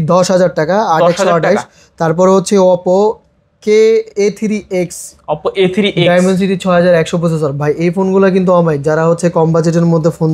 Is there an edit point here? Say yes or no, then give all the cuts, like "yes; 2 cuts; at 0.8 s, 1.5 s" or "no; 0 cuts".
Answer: no; 0 cuts